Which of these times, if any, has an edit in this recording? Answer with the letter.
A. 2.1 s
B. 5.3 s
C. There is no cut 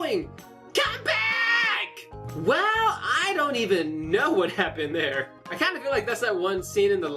B